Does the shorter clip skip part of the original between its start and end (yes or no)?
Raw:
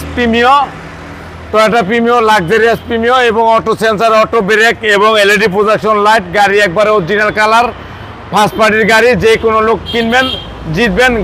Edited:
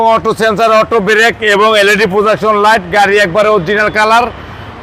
no